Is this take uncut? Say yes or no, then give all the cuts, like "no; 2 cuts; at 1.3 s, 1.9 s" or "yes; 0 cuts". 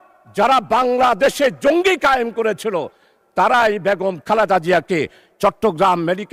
yes; 0 cuts